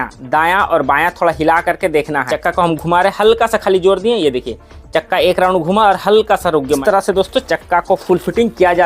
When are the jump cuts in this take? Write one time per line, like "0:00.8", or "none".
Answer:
0:02.3
0:06.8